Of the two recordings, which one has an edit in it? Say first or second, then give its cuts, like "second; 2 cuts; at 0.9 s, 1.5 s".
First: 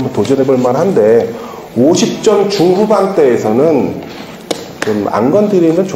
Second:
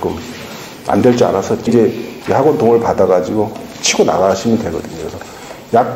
second; 1 cut; at 1.7 s